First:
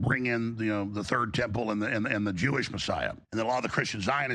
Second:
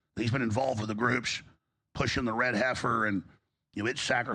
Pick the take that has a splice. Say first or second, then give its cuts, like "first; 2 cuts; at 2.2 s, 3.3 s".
first; 1 cut; at 3.2 s